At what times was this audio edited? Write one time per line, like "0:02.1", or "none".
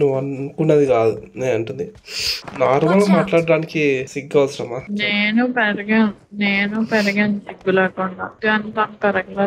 none